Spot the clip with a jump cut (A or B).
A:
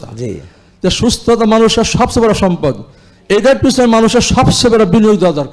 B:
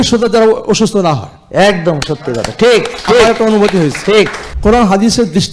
B